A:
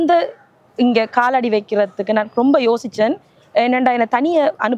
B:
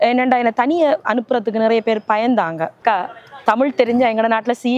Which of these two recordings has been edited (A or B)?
B